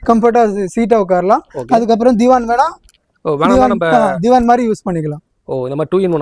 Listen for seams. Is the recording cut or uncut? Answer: uncut